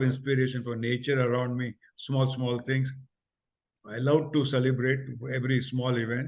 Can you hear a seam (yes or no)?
no